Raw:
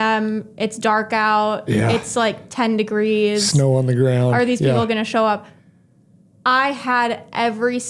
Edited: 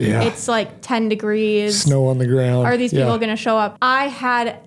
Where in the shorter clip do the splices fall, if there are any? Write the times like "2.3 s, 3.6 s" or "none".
3.8 s

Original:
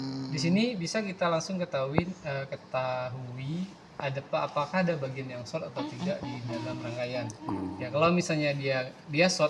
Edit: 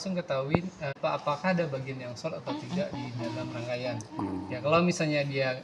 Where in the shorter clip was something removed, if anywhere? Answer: 1.0 s

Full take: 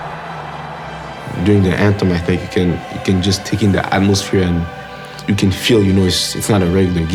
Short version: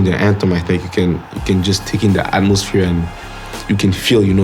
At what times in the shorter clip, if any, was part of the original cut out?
none

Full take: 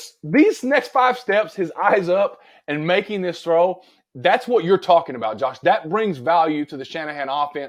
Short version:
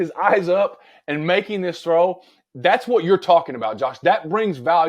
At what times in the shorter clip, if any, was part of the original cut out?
none

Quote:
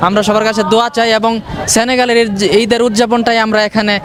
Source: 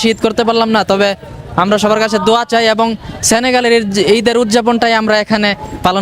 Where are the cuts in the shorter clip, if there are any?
none

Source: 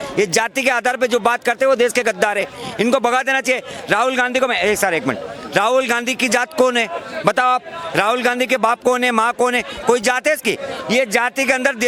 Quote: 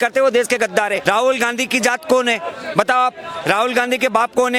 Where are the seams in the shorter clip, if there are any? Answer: 1.0 s

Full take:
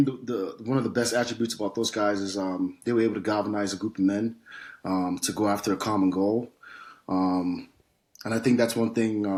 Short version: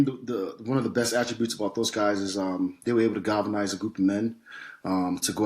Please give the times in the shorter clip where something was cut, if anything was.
none

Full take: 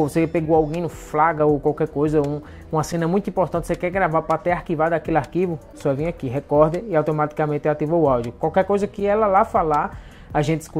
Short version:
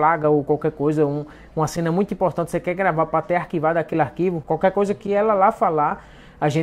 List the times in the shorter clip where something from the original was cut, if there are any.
4.4 s

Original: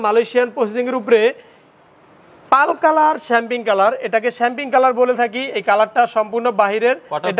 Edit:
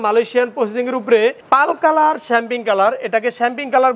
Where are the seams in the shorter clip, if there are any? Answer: 1.4 s

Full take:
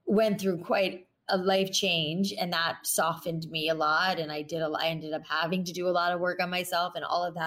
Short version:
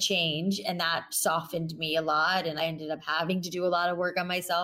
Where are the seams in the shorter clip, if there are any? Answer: 2.6 s

